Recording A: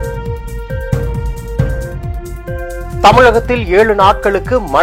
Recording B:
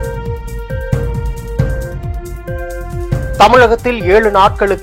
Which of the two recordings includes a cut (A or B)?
A